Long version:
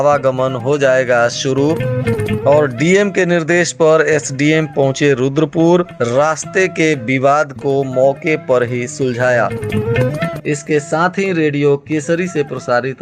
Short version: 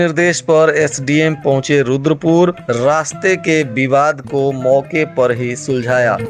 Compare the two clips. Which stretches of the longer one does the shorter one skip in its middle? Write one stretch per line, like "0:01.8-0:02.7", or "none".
none